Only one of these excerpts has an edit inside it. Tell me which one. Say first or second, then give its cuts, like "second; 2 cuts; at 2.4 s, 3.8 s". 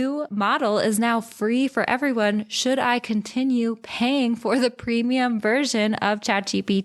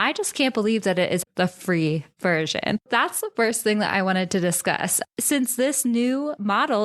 second; 3 cuts; at 1.2 s, 2.8 s, 5.1 s